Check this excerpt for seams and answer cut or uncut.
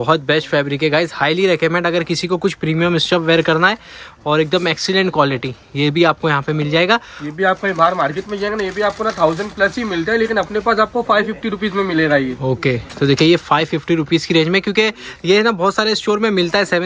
uncut